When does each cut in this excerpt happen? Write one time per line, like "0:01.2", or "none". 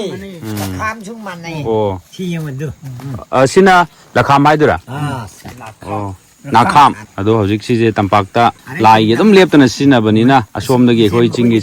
0:07.1
0:08.7
0:10.6